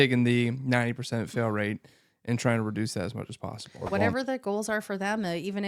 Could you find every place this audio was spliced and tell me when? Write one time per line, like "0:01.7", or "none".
0:03.7